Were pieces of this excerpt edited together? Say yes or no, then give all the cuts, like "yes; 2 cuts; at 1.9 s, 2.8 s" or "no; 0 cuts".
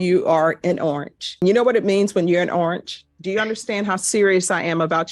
yes; 1 cut; at 3.1 s